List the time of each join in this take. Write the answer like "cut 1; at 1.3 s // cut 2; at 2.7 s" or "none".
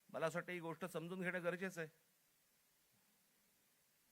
cut 1; at 2.4 s

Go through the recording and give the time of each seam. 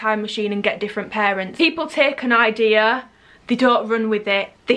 cut 1; at 1.5 s

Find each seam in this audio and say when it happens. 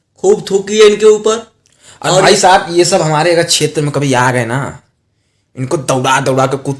none

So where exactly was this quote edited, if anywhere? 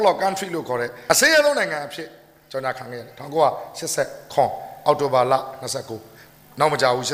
cut 1; at 0.9 s

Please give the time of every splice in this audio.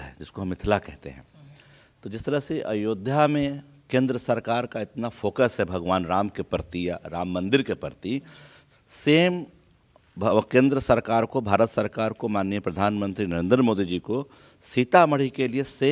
none

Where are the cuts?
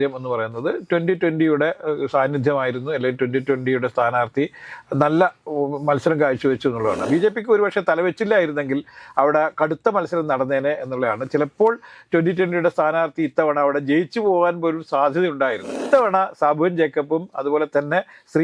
cut 1; at 7.0 s // cut 2; at 15.9 s

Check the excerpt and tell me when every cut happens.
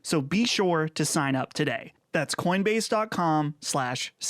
none

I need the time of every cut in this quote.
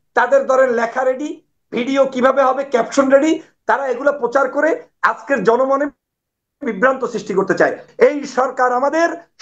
cut 1; at 7.8 s

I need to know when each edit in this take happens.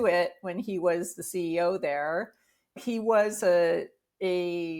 cut 1; at 2.8 s

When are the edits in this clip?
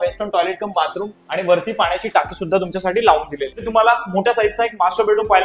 cut 1; at 3.7 s

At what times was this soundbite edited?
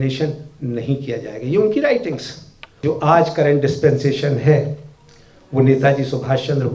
cut 1; at 2.8 s

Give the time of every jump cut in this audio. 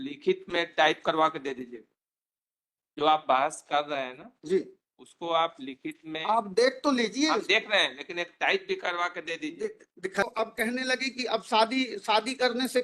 cut 1; at 10.2 s

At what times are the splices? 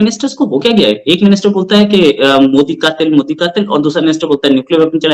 none

